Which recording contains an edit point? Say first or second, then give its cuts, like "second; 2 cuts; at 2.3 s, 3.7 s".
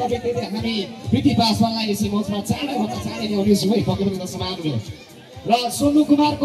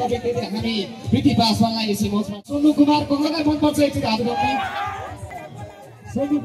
second; 2 cuts; at 2.4 s, 5.4 s